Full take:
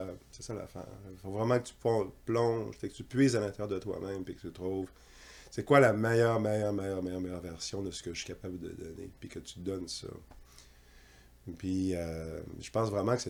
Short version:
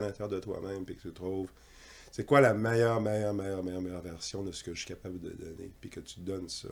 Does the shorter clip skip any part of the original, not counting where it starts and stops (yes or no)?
no